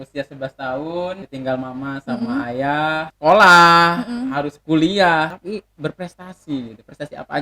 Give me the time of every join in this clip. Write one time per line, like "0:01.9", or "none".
0:01.3
0:03.1
0:05.4